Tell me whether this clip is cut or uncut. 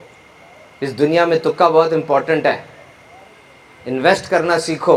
uncut